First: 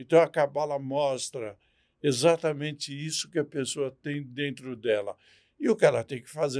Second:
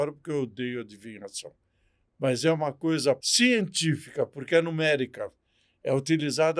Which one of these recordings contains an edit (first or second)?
second